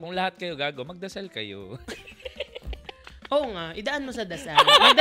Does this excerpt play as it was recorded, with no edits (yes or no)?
yes